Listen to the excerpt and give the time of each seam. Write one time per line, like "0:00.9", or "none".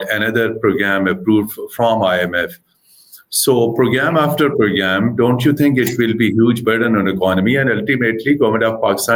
none